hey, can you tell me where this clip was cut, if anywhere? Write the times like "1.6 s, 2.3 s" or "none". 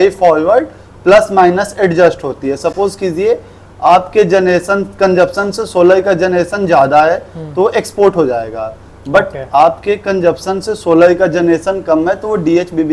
none